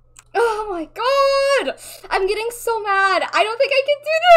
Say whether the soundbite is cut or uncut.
uncut